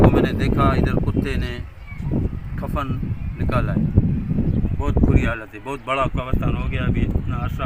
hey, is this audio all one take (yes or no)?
no